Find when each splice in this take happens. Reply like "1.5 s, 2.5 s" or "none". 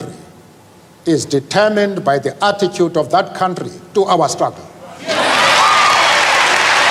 none